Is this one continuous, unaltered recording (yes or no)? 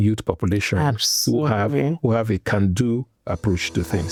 yes